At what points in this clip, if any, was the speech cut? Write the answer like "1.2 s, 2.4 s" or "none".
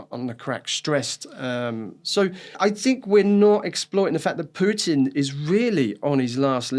2.5 s